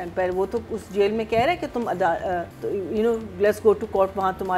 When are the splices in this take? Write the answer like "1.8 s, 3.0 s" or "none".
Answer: 2.5 s